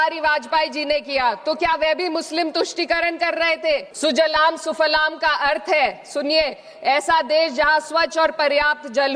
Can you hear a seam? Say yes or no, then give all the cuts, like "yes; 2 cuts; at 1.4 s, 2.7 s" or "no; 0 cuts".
yes; 1 cut; at 3.9 s